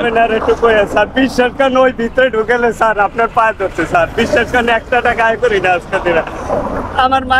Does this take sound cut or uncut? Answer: uncut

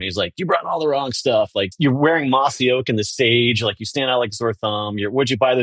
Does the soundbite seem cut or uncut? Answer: cut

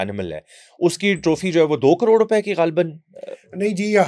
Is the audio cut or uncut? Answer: uncut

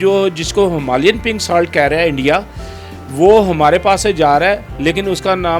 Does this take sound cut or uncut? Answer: uncut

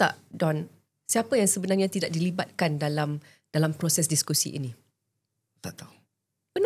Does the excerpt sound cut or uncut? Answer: uncut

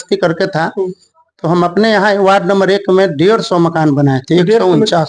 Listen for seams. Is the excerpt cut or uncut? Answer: uncut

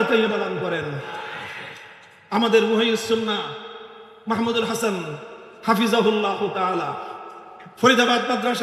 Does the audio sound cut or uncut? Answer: uncut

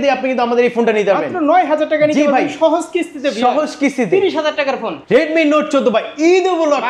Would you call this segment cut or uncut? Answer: cut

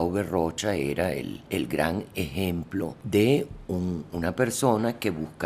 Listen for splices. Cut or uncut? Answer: cut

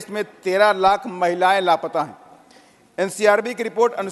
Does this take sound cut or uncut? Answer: uncut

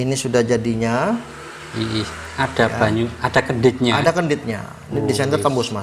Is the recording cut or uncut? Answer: uncut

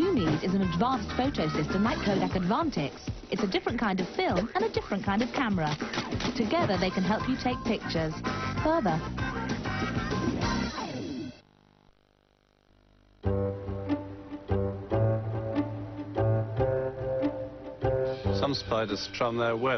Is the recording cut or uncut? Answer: uncut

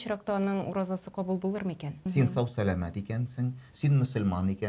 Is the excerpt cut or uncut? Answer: cut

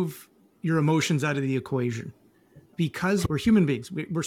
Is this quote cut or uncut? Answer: cut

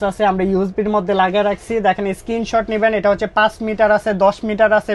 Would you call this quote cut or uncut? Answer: uncut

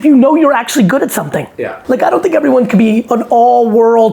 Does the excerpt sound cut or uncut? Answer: cut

